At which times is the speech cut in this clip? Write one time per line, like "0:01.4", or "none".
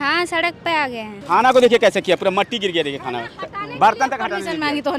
0:01.1

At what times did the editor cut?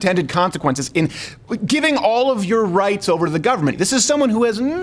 0:03.8

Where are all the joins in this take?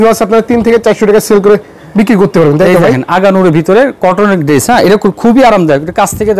none

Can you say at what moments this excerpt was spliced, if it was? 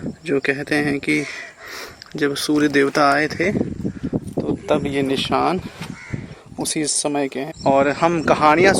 0:07.6

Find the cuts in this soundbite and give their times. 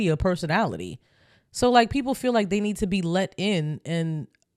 none

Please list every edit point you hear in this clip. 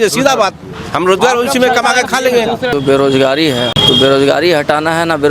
0:02.7
0:03.8

